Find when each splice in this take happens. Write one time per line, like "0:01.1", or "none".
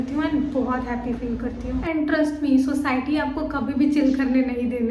0:01.8